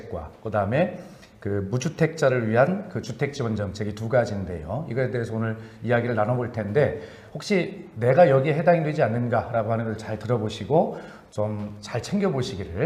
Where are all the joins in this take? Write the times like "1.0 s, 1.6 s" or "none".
none